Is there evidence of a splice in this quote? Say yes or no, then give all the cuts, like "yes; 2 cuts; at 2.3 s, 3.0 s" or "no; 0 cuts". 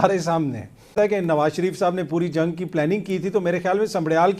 yes; 1 cut; at 0.9 s